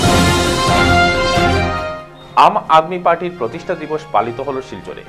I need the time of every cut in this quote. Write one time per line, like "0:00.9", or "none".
none

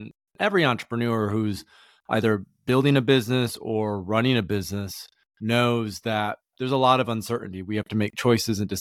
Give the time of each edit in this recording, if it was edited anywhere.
none

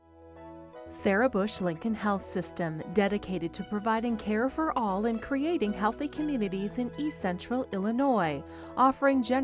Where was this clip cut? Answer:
0:01.0

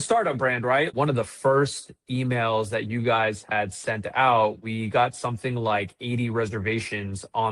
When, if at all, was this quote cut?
0:00.9

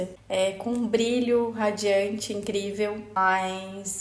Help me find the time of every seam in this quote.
0:03.1

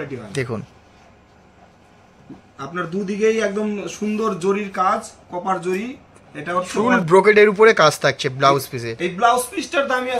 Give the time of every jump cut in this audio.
0:06.7

